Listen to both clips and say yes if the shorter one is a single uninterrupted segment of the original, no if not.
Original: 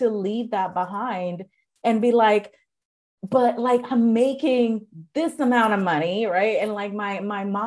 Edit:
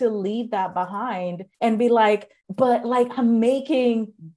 no